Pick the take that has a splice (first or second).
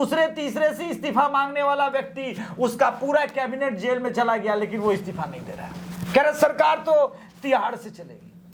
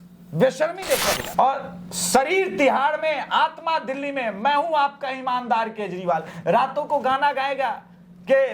second